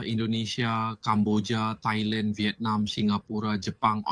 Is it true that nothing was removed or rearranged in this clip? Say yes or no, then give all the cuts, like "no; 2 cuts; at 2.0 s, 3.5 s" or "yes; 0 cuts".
yes; 0 cuts